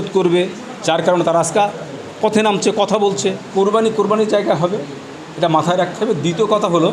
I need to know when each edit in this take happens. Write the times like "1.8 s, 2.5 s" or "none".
3.5 s

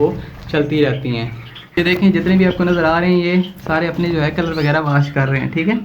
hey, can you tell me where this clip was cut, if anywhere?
1.8 s

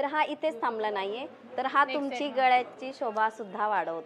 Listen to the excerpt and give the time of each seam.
none

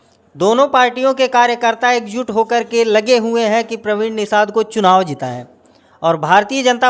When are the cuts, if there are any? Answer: none

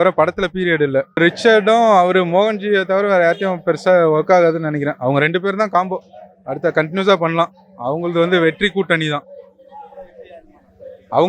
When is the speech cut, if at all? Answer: 1.2 s

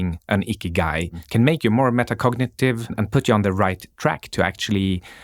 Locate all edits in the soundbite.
1.2 s, 3.0 s

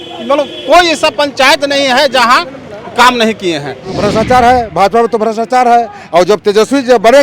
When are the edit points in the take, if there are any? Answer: 4.0 s

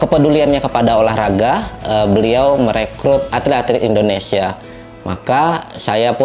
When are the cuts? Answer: 3.3 s

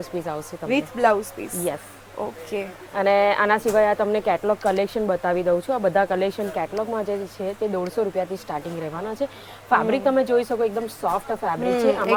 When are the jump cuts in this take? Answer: none

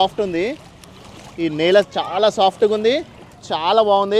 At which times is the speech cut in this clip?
1.3 s

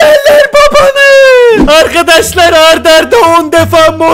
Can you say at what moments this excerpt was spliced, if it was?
1.6 s

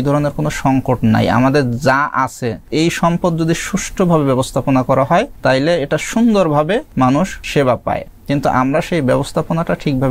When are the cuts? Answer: 2.7 s, 5.3 s, 7.3 s, 8.1 s

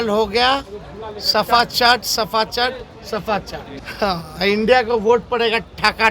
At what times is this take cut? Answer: 3.7 s

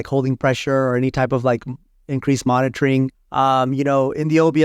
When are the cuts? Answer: none

